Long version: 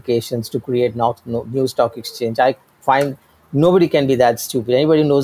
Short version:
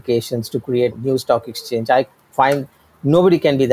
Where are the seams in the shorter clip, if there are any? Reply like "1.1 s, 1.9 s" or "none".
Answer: 0.9 s